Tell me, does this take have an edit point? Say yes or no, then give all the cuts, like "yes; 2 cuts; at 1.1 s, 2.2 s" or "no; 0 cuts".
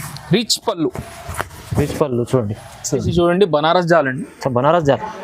yes; 1 cut; at 3.0 s